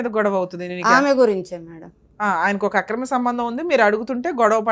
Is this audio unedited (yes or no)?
yes